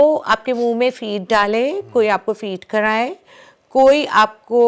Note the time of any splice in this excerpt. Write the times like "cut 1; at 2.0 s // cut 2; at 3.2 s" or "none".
none